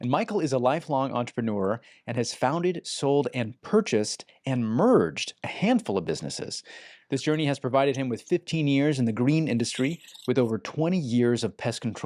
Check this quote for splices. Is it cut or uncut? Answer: uncut